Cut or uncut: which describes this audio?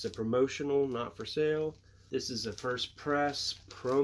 cut